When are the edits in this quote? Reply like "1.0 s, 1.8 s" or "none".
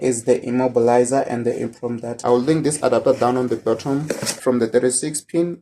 2.2 s, 4.4 s